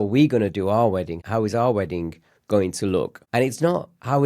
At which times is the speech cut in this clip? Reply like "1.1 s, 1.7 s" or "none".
1.2 s, 3.2 s